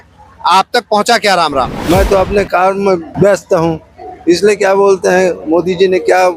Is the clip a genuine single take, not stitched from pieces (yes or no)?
no